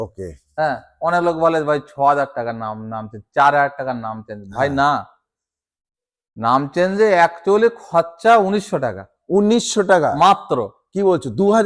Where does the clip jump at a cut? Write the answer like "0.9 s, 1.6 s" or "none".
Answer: none